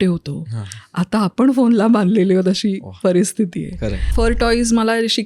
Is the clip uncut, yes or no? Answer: no